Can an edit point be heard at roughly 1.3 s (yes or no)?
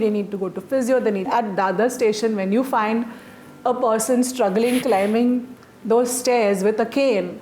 yes